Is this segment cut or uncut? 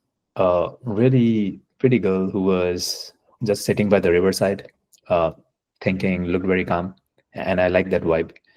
uncut